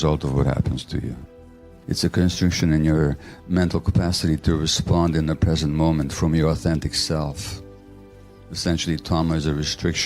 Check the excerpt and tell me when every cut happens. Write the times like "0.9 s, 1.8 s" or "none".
1.7 s